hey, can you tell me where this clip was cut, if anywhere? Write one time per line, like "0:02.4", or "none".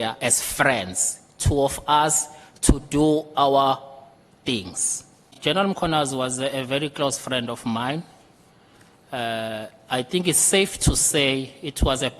0:05.4